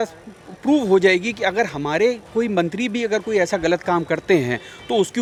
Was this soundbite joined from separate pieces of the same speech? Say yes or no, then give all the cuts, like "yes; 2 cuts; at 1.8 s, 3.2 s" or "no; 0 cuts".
no; 0 cuts